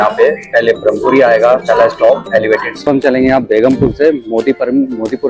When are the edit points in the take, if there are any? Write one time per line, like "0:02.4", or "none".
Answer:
0:02.8